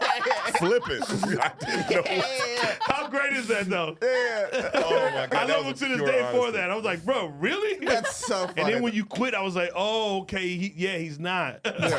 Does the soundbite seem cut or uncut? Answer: uncut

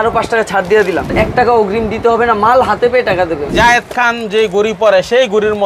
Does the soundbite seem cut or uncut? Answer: cut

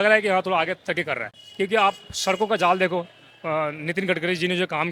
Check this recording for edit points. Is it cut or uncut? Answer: uncut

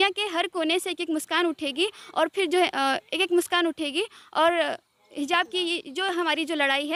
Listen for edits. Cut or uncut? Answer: uncut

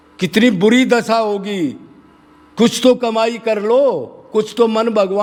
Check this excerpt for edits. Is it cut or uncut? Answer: uncut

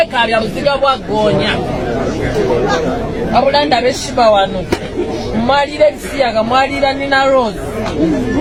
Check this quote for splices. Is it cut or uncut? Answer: uncut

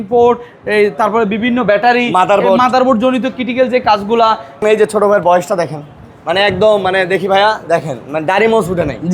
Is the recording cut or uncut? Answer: cut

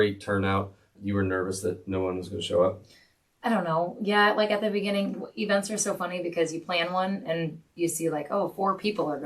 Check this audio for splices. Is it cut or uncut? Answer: cut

